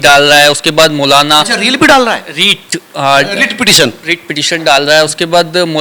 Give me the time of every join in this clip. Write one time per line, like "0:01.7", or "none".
none

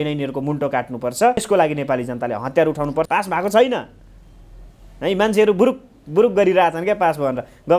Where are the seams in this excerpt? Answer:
0:01.4
0:03.1

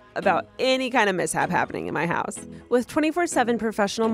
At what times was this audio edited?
0:02.4

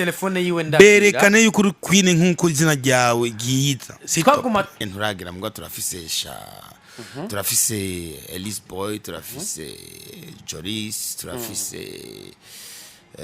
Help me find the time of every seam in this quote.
0:04.8

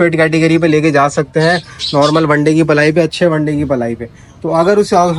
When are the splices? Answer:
none

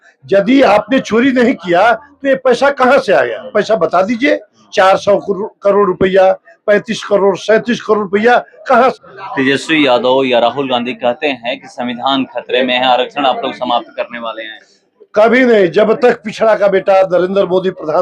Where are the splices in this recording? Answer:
0:08.9

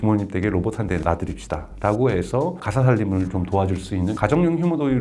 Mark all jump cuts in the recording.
0:01.0
0:02.6
0:04.2

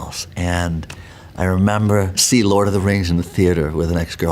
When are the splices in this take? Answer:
0:02.2

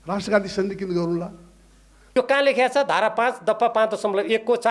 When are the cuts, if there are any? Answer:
0:01.9

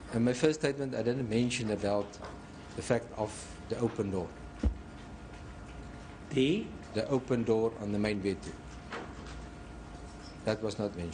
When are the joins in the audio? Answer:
none

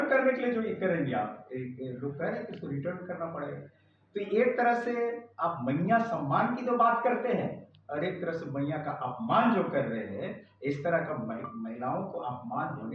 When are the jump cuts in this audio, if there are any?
none

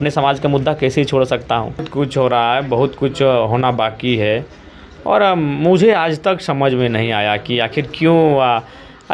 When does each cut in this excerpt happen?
none

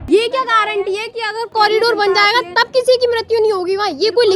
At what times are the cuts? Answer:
0:01.5

